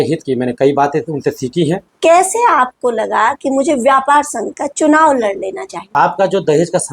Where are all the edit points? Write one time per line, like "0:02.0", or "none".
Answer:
0:01.9
0:05.8